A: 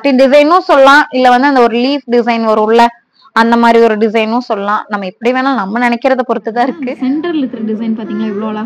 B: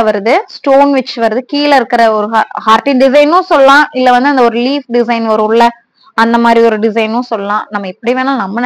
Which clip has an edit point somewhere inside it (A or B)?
A